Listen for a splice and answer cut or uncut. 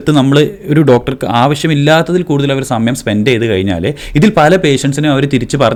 uncut